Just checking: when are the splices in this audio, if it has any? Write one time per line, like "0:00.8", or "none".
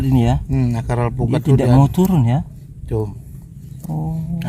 none